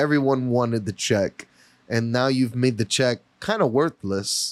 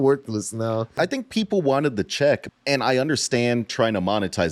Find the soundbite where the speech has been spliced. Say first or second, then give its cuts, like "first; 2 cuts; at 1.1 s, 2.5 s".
second; 2 cuts; at 1.0 s, 2.4 s